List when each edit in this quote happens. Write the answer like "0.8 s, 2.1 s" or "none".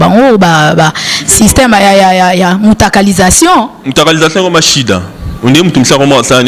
none